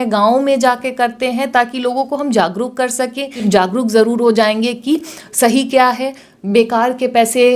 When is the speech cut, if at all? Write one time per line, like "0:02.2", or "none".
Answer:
0:03.3